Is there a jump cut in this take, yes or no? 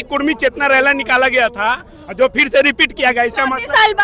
no